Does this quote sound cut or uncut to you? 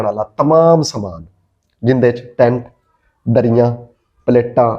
uncut